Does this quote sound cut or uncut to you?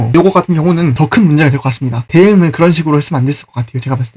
cut